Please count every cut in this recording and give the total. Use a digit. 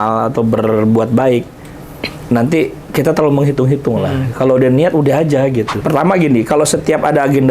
1